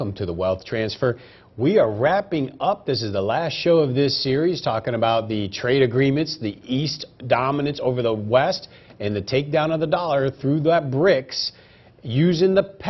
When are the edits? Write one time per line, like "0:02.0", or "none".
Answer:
none